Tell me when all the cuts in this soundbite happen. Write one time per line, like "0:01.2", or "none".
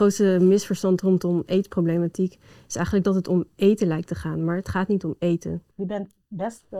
0:05.7